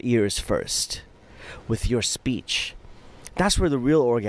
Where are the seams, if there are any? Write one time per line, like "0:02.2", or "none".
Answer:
none